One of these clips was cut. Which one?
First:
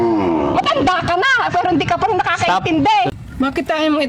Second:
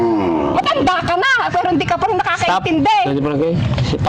first; 1 cut; at 3.1 s

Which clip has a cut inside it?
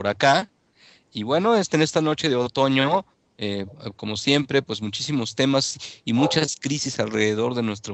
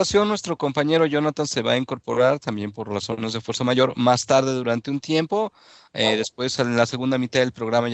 second; 1 cut; at 5.9 s

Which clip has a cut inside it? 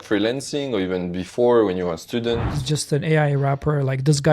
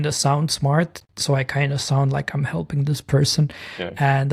first; 1 cut; at 2.6 s

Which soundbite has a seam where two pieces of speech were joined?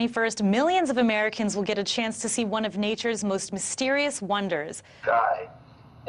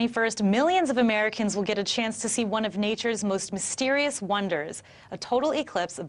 second; 1 cut; at 5.1 s

